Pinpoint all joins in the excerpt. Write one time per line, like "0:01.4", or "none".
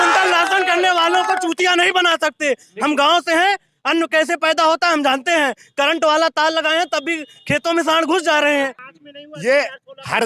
0:08.8